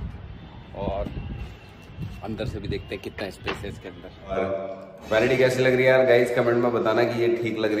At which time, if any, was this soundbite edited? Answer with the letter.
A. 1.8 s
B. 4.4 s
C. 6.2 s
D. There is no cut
B